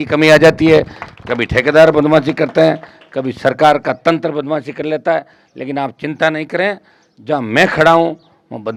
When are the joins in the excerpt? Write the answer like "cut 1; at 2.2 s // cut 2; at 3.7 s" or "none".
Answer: none